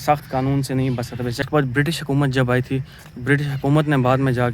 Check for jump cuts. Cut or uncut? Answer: cut